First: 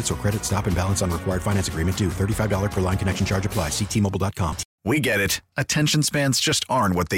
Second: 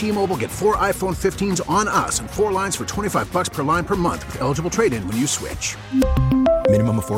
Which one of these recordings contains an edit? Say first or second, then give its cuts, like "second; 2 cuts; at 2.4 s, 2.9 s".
first; 1 cut; at 4.7 s